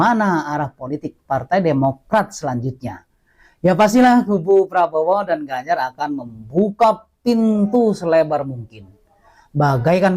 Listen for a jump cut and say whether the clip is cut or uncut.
uncut